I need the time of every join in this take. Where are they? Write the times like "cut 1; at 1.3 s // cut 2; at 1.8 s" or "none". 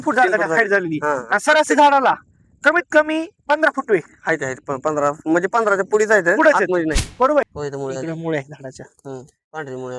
cut 1; at 7.5 s